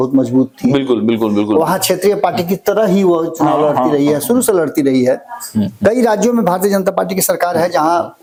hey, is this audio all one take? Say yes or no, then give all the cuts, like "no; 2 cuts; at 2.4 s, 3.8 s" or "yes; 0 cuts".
yes; 0 cuts